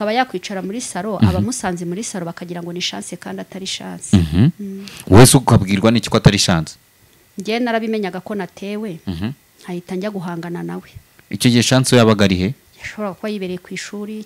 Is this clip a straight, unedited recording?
yes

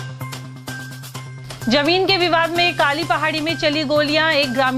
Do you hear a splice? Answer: yes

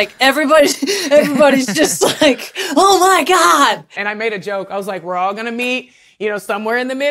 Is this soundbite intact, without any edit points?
no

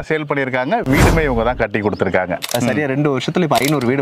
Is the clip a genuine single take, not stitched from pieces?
no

